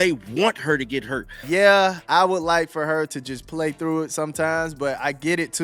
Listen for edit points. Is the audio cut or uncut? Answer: cut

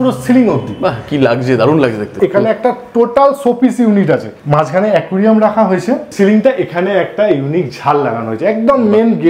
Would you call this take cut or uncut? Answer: cut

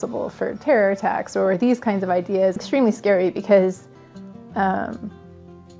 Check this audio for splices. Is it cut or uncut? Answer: cut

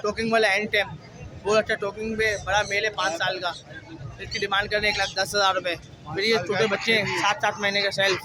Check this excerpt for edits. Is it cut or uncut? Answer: uncut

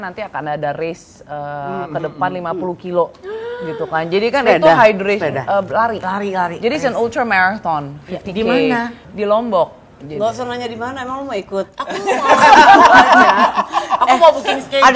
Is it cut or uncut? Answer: uncut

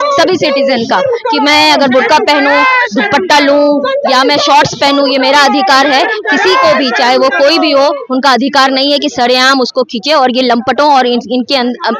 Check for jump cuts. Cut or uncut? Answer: uncut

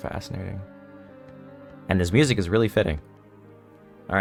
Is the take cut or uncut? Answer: uncut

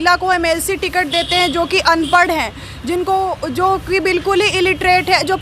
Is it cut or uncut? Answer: uncut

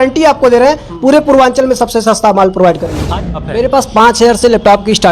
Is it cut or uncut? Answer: cut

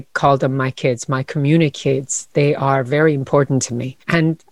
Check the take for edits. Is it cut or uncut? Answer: uncut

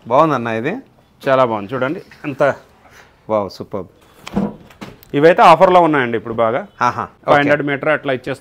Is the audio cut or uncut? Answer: cut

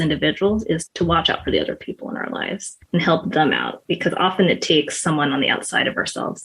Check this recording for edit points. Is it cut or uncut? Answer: cut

